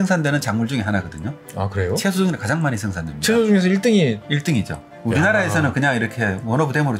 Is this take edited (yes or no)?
no